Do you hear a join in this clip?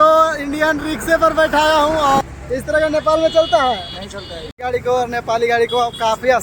yes; 2 cuts; at 2.2 s, 4.5 s

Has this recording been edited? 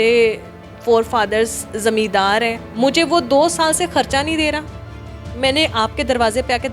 yes; 1 cut; at 2.6 s

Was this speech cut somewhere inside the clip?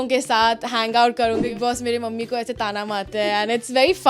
yes; 1 cut; at 1.4 s

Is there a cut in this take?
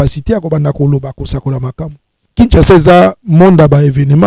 yes; 1 cut; at 2.2 s

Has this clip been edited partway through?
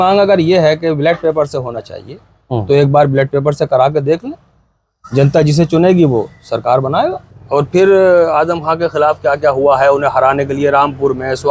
yes; 1 cut; at 7.3 s

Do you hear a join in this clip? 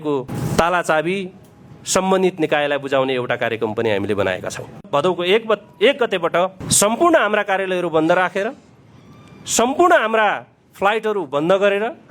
yes; 2 cuts; at 4.9 s, 6.6 s

